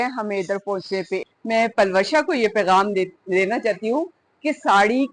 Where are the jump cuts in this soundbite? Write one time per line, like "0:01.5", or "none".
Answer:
0:01.2